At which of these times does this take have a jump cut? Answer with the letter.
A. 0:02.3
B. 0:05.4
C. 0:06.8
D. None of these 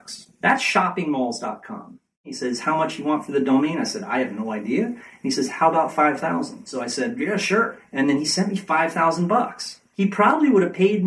A